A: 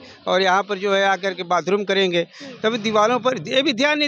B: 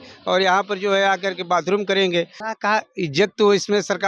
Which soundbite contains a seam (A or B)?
B